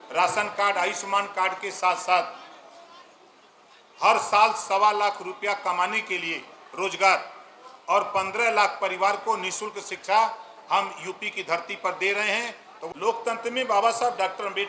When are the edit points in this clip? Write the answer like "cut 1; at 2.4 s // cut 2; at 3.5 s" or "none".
cut 1; at 12.8 s